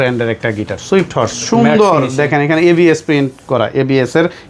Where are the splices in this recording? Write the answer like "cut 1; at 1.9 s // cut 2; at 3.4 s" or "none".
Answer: none